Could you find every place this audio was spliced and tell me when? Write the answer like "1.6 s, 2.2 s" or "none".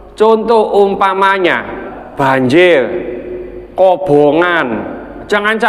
1.9 s